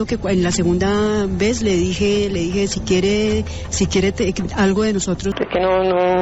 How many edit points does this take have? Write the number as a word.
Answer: one